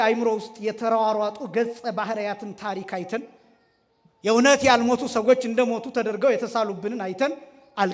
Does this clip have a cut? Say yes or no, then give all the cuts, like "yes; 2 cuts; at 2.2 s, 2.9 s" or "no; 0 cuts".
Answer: no; 0 cuts